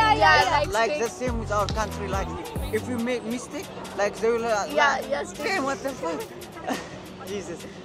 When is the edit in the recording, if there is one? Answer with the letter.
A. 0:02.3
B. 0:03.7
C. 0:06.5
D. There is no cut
D